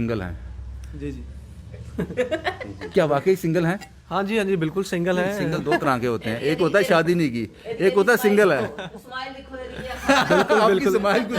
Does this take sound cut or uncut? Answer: uncut